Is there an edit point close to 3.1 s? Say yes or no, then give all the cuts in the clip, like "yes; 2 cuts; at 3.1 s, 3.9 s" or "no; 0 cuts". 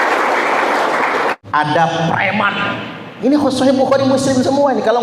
no; 1 cut; at 1.4 s